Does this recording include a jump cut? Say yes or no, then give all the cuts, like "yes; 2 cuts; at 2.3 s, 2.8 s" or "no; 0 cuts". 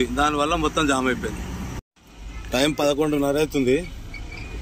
yes; 1 cut; at 1.8 s